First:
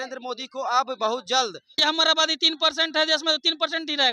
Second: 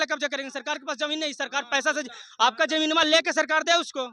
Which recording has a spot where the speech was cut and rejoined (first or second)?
first